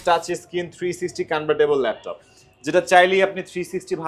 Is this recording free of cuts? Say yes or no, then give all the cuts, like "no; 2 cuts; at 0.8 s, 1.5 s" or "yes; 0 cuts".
yes; 0 cuts